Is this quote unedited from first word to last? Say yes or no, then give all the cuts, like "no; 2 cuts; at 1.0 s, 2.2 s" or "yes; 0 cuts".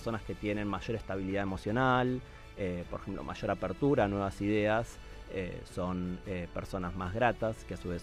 yes; 0 cuts